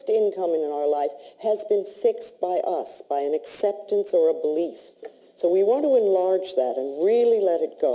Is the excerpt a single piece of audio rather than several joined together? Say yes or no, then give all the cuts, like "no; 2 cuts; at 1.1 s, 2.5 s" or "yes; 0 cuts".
no; 1 cut; at 2.3 s